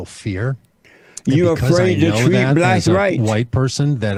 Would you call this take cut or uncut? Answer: uncut